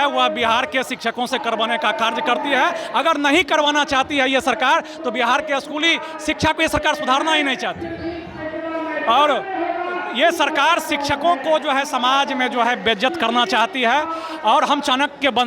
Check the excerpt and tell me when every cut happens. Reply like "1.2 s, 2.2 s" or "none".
none